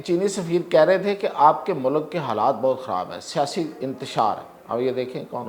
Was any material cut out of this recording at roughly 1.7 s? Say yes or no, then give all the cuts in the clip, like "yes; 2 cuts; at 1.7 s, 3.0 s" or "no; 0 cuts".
no; 1 cut; at 4.5 s